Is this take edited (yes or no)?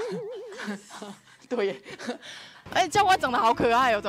yes